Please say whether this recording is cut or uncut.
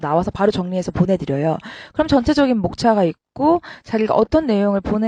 uncut